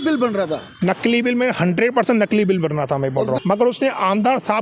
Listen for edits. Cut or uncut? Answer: cut